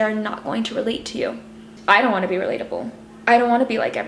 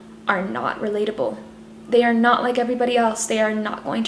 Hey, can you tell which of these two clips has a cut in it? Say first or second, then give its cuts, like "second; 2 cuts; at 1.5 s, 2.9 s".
first; 1 cut; at 1.7 s